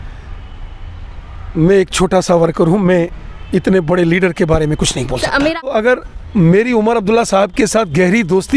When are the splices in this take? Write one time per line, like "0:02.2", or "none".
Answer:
0:05.5